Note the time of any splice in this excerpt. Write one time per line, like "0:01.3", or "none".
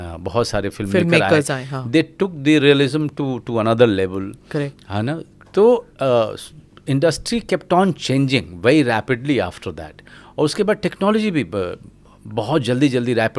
none